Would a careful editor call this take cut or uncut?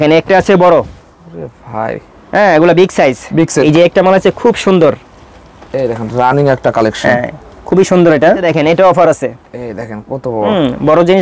cut